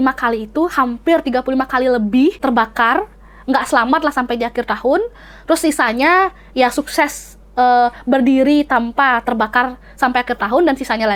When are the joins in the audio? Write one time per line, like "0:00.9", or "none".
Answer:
0:02.4